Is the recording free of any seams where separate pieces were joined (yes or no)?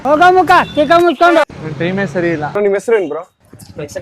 no